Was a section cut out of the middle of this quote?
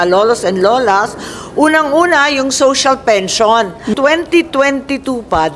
yes; 1 cut; at 3.9 s

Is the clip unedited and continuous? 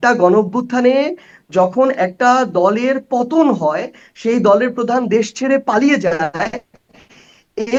yes; 0 cuts

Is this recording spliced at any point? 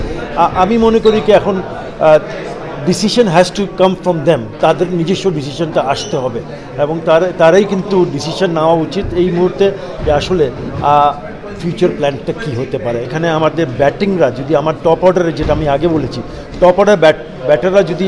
yes; 1 cut; at 13.1 s

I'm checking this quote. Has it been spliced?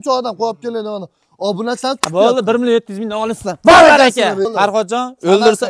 yes; 1 cut; at 4.5 s

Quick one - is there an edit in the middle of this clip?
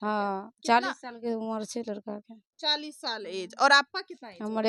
no; 0 cuts

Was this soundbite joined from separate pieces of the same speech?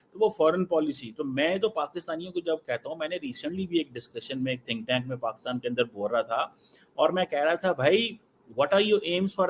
no; 0 cuts

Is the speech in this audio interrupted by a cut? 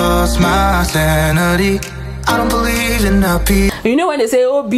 yes; 1 cut; at 3.7 s

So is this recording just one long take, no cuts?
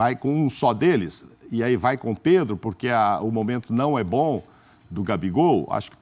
yes; 0 cuts

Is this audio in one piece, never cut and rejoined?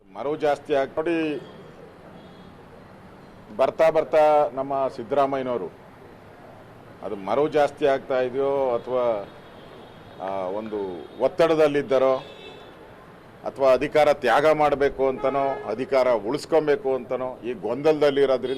no; 1 cut; at 0.9 s

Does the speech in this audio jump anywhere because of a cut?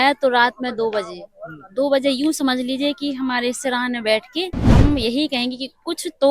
yes; 1 cut; at 4.6 s

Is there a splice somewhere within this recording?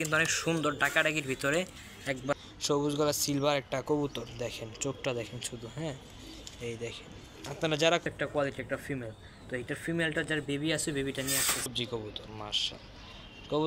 yes; 3 cuts; at 2.3 s, 8.0 s, 11.8 s

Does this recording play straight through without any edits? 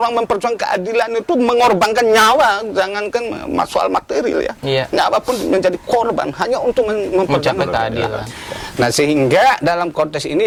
yes; 0 cuts

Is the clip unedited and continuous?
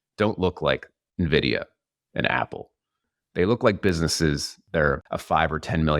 no; 3 cuts; at 1.0 s, 3.0 s, 4.8 s

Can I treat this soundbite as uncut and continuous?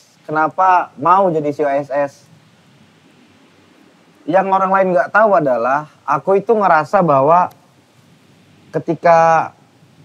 yes; 0 cuts

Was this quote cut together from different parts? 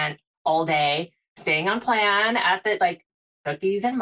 no; 0 cuts

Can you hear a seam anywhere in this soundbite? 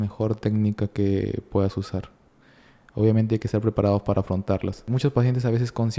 yes; 1 cut; at 4.9 s

